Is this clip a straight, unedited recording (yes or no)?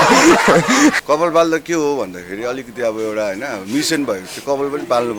no